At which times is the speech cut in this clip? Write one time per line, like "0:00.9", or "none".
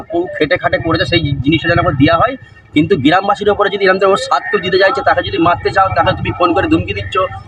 none